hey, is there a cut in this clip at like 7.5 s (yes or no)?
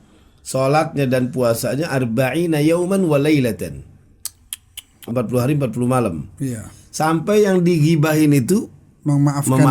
no